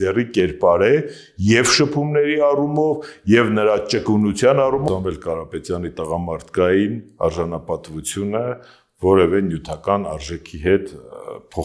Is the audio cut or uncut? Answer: cut